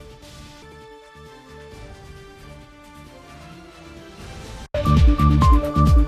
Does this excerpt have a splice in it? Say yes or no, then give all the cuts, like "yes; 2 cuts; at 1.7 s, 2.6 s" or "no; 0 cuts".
no; 0 cuts